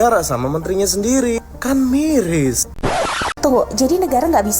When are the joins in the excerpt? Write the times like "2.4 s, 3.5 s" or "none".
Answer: 2.8 s